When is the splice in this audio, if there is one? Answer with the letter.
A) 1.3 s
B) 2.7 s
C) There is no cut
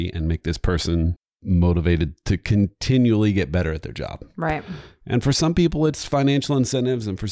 A